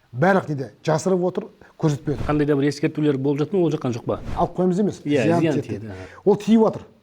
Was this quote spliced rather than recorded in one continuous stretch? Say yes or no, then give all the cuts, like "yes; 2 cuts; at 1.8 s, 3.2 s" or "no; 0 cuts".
yes; 2 cuts; at 2.2 s, 4.3 s